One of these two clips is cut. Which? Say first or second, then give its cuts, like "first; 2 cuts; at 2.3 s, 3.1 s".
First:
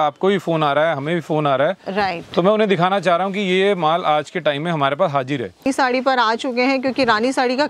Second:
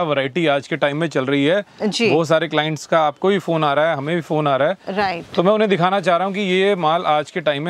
first; 1 cut; at 5.7 s